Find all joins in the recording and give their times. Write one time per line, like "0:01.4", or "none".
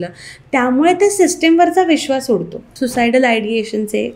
0:02.6